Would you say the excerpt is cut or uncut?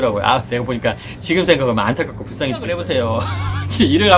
cut